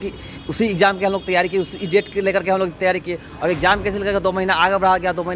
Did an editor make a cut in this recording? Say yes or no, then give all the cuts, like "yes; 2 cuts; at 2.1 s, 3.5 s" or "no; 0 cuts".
no; 0 cuts